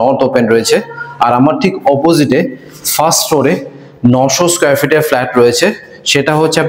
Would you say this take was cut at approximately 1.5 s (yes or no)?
no